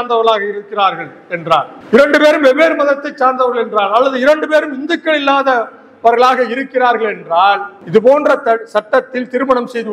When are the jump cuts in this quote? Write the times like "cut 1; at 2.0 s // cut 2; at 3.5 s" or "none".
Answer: cut 1; at 1.8 s // cut 2; at 7.7 s